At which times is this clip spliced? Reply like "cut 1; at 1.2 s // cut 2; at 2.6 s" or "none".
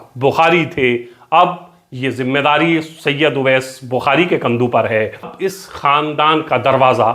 cut 1; at 5.3 s